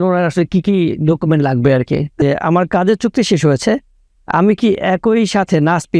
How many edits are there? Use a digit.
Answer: 1